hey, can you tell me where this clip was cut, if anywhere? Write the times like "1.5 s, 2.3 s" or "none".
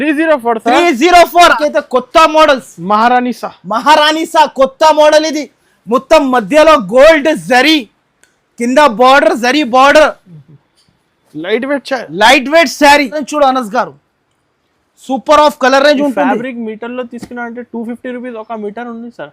1.6 s, 13.2 s